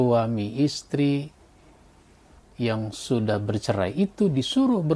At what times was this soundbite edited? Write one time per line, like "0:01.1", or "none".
none